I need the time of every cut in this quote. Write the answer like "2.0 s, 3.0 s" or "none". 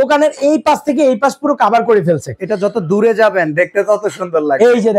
none